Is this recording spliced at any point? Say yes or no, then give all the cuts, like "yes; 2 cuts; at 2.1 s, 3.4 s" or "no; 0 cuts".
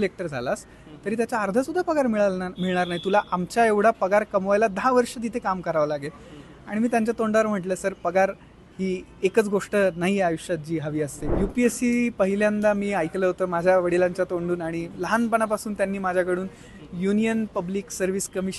yes; 1 cut; at 11.2 s